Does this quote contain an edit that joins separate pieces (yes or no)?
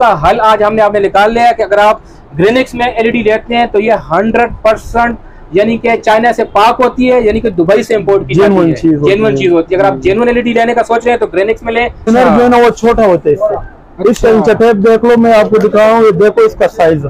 yes